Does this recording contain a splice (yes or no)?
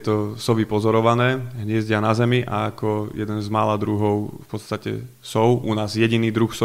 no